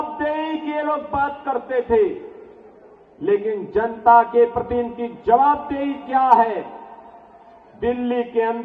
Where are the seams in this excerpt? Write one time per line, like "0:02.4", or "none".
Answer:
none